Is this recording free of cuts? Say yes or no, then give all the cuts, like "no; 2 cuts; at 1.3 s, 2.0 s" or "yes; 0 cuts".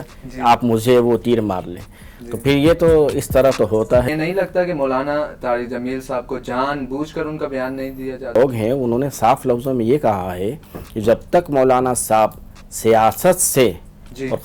no; 2 cuts; at 4.1 s, 8.3 s